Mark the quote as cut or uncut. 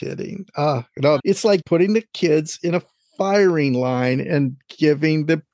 cut